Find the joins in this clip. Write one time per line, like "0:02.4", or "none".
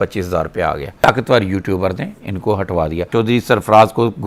0:00.9
0:03.0

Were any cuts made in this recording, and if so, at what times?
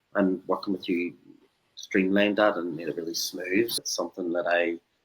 0:03.8

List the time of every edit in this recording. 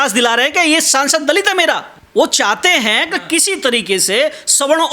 0:01.9

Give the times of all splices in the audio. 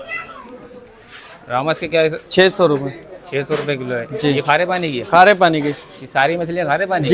none

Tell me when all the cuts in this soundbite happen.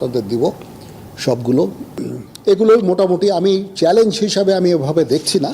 0:01.9

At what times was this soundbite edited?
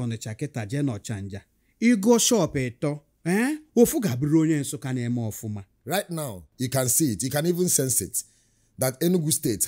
0:03.1
0:05.7

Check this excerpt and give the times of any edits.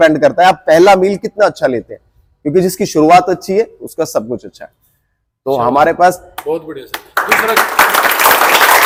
none

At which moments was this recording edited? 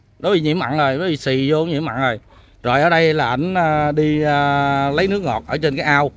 none

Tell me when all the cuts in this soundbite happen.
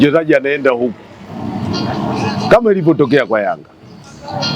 none

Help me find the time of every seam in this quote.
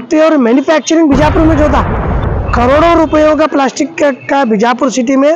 0:02.3

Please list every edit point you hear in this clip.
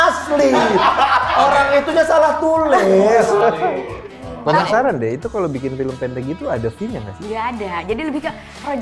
0:04.7

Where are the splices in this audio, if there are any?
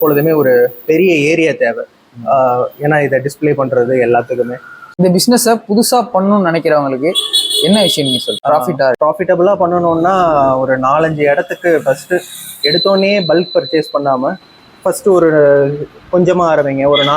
0:04.9
0:08.4
0:09.0

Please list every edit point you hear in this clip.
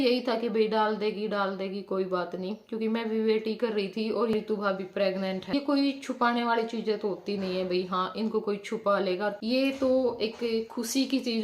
0:04.3
0:05.5
0:09.4

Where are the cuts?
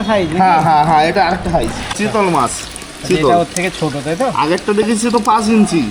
0:01.8

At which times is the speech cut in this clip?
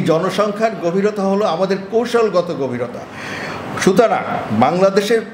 none

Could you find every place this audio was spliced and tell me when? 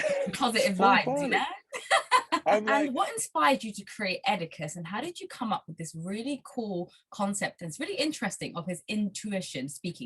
0:02.7

